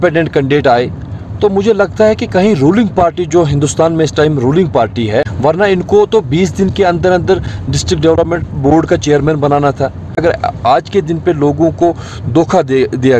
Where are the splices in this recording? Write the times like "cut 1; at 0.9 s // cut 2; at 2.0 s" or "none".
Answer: cut 1; at 5.3 s // cut 2; at 10.2 s